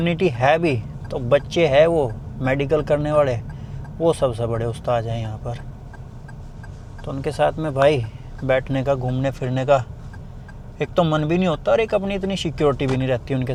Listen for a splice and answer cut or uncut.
uncut